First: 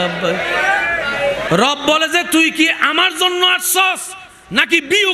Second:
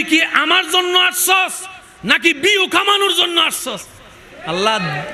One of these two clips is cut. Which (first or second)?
first